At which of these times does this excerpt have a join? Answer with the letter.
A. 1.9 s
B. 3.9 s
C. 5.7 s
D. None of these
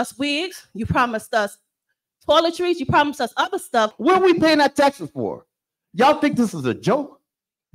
B